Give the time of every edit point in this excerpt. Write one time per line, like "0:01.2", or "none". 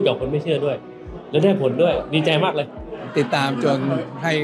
0:03.0